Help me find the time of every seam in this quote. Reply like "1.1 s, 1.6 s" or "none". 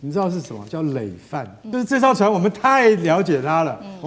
1.6 s